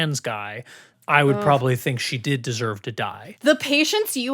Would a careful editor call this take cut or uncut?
cut